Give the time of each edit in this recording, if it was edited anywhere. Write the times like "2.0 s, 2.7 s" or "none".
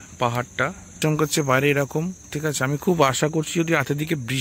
1.0 s